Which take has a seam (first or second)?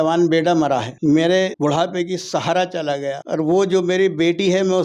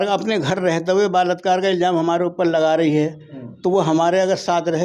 first